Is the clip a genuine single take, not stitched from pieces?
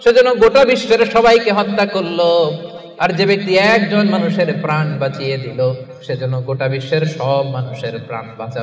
yes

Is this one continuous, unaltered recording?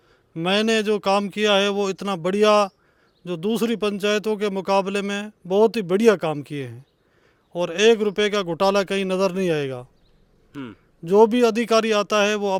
yes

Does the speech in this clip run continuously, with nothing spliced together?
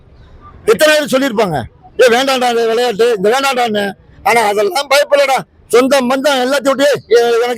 yes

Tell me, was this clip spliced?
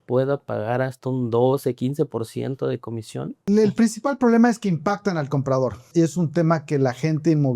yes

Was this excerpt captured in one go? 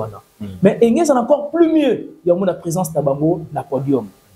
yes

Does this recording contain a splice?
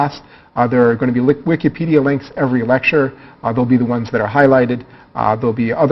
yes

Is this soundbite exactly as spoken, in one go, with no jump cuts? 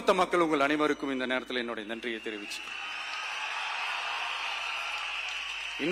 yes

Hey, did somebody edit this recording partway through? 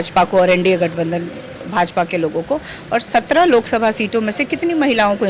no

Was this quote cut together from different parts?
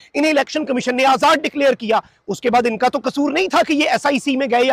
no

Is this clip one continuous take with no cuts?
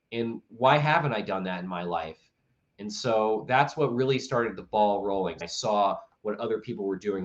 no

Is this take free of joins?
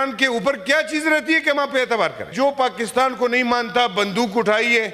no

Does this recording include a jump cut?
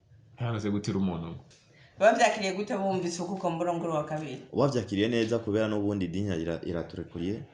yes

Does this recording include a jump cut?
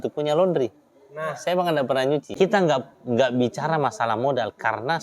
yes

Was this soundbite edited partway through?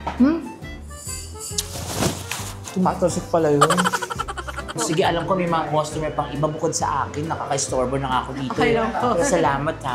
yes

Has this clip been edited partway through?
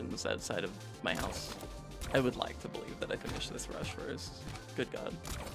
yes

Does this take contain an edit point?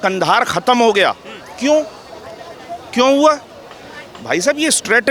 no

